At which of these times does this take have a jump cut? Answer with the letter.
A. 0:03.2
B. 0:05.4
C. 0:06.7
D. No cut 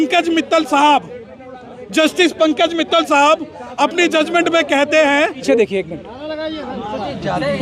B